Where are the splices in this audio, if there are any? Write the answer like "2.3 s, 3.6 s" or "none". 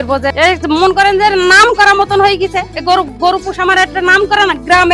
2.7 s